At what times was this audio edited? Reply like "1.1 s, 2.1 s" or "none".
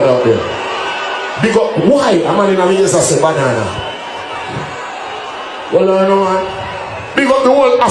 none